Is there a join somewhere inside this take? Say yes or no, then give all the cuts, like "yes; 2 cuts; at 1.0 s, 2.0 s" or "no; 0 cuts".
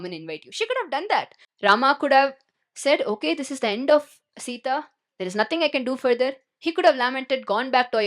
yes; 1 cut; at 1.4 s